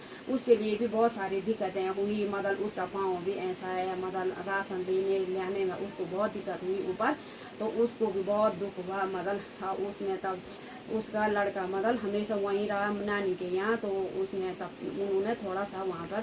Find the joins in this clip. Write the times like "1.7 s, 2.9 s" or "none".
none

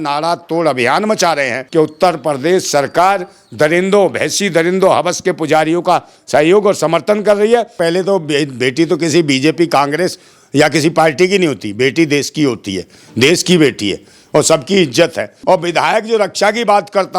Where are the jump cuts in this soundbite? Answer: 1.6 s, 7.7 s, 15.3 s

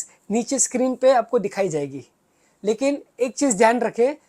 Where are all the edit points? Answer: none

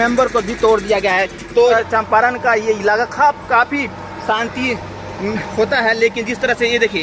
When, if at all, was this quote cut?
1.7 s

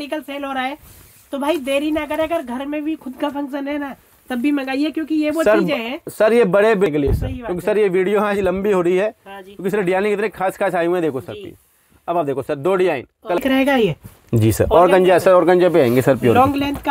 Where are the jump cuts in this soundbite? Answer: 6.9 s, 13.4 s

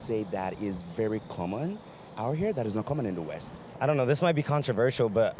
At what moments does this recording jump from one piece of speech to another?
none

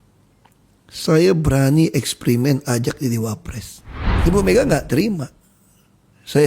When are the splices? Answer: 4.1 s

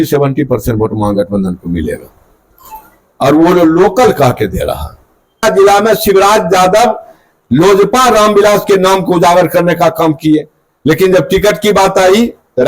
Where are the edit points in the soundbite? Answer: 5.4 s

